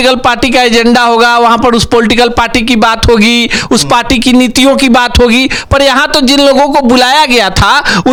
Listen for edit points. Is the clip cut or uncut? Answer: uncut